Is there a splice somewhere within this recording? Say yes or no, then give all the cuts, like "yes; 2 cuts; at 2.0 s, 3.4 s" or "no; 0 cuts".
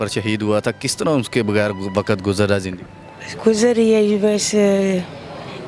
no; 0 cuts